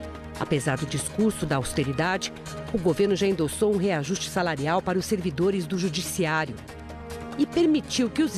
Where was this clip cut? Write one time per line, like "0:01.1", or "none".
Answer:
none